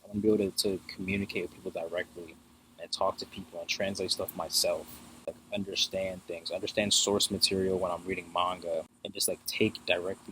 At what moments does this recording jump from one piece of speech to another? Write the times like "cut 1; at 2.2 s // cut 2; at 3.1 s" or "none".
cut 1; at 5.3 s // cut 2; at 9.0 s